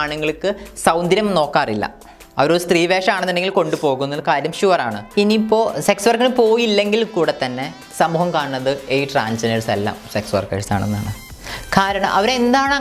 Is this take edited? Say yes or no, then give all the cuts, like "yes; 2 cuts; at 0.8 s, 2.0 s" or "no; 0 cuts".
yes; 1 cut; at 5.0 s